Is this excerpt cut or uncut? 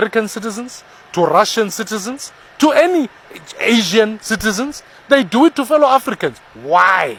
uncut